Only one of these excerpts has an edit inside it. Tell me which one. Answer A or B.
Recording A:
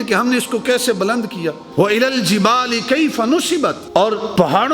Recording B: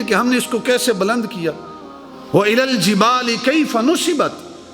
A